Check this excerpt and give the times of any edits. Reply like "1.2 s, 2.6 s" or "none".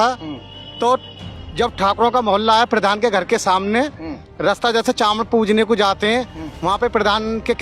none